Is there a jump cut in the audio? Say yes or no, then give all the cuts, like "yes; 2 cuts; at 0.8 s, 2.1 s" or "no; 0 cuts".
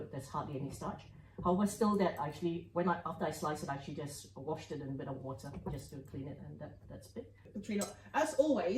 yes; 1 cut; at 7.5 s